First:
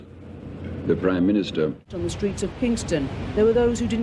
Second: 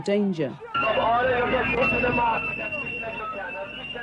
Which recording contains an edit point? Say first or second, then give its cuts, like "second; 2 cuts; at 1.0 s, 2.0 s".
first; 1 cut; at 1.9 s